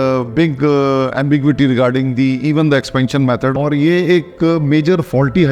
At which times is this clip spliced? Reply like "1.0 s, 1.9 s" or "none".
3.5 s